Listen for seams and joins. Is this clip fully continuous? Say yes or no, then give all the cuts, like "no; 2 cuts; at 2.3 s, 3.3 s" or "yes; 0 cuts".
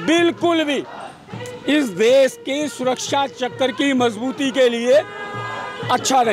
yes; 0 cuts